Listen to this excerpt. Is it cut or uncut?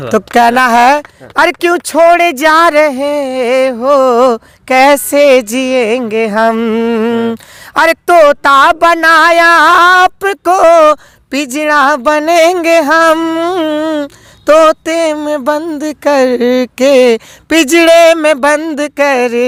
uncut